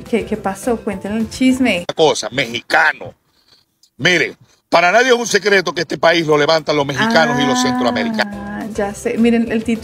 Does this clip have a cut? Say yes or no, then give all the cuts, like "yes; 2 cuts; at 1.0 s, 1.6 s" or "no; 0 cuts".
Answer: no; 0 cuts